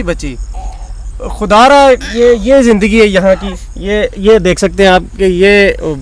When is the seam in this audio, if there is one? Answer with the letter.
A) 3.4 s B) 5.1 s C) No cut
C